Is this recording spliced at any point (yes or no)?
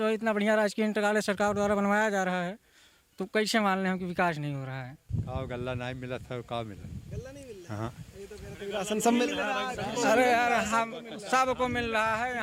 yes